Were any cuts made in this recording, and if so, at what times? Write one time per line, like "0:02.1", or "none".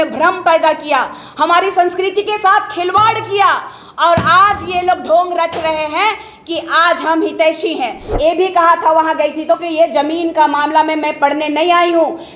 0:08.1